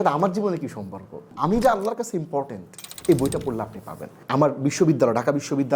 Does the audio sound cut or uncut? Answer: cut